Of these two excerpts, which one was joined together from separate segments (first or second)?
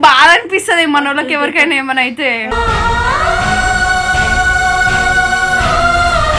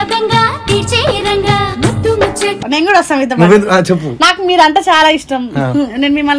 second